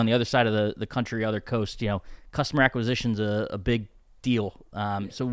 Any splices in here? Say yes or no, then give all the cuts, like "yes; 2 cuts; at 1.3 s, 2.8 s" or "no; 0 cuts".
no; 0 cuts